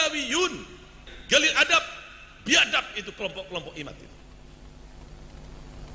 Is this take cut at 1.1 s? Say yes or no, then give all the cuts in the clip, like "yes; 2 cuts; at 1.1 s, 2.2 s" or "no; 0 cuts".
yes; 1 cut; at 1.1 s